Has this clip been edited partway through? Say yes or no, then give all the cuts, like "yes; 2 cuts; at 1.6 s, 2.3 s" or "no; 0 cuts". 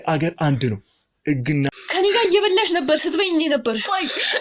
yes; 1 cut; at 1.8 s